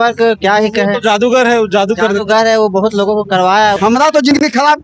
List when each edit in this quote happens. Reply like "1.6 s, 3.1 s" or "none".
3.8 s